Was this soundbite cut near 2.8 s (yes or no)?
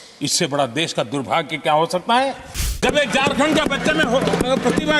yes